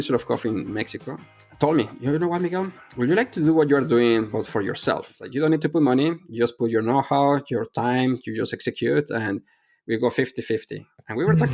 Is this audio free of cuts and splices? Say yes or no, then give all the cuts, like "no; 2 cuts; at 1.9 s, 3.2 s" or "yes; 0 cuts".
no; 2 cuts; at 1.2 s, 5.2 s